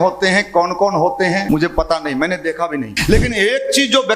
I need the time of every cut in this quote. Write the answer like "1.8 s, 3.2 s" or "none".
1.4 s, 2.9 s